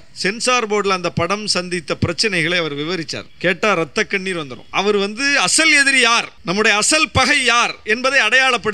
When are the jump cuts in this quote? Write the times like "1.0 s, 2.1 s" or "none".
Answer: 3.2 s, 4.6 s, 6.3 s